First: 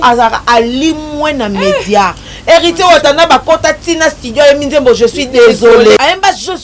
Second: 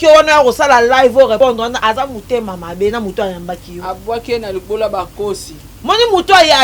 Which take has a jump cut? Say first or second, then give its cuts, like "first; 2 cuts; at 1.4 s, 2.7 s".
second; 1 cut; at 1.5 s